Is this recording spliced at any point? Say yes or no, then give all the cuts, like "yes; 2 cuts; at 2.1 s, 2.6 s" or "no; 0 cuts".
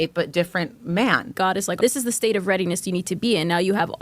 yes; 1 cut; at 1.5 s